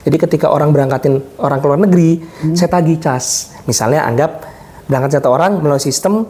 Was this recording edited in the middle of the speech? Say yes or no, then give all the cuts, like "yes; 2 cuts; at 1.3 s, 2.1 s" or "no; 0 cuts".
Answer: no; 0 cuts